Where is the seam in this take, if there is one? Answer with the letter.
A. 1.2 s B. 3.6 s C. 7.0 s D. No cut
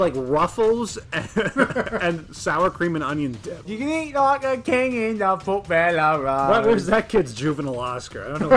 B